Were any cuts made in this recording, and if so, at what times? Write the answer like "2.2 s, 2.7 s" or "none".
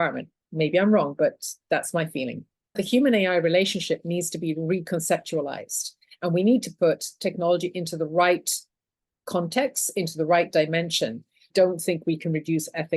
2.8 s, 11.5 s